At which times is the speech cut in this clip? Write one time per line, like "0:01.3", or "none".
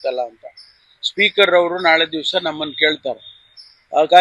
none